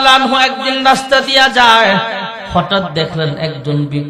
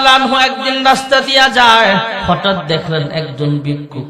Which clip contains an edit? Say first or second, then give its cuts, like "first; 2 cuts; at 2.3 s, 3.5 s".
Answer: second; 1 cut; at 2.2 s